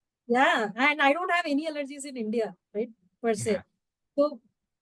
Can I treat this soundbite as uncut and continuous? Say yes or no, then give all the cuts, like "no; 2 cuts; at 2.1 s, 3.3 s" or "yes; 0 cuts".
yes; 0 cuts